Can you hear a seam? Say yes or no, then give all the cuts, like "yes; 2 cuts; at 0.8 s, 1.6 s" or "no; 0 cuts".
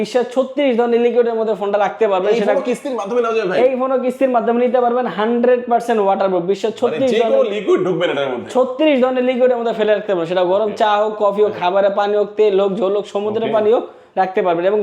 no; 0 cuts